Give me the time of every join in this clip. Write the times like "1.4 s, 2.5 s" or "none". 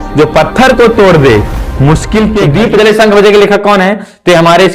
2.4 s